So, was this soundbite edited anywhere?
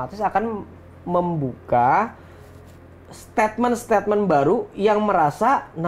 no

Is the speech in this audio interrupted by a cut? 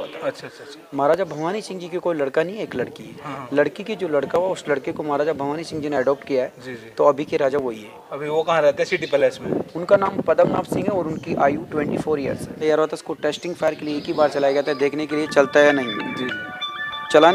yes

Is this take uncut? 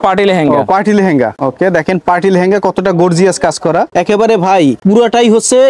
no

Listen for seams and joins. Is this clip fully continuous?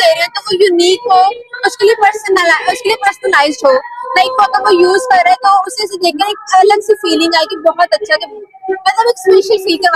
yes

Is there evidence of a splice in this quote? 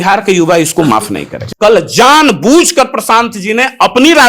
yes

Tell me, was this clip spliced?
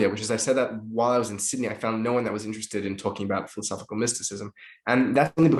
no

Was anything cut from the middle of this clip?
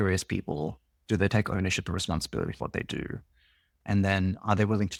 no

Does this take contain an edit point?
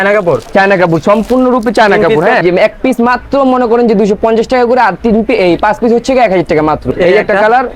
yes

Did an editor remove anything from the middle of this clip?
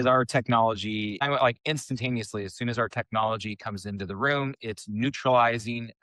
yes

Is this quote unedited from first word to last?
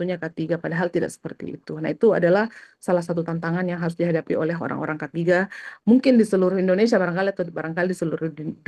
yes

